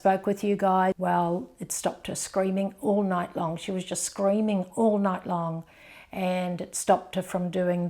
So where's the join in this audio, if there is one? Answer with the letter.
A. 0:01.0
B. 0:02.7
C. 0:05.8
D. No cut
A